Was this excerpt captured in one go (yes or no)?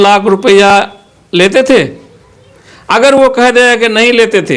yes